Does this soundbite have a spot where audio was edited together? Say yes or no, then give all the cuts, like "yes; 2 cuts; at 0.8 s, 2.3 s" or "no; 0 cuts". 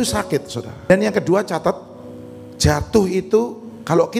yes; 1 cut; at 0.9 s